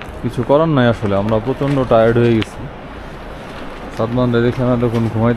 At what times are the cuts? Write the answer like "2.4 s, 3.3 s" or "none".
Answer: none